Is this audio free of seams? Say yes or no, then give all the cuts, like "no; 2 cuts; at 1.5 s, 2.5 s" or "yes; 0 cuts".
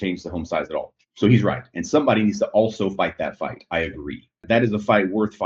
no; 1 cut; at 4.4 s